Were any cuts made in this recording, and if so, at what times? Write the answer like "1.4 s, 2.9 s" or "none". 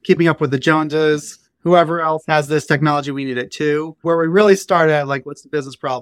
4.0 s